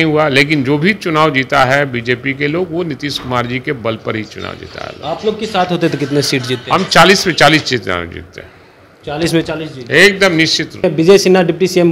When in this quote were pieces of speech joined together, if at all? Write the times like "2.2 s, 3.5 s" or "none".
10.8 s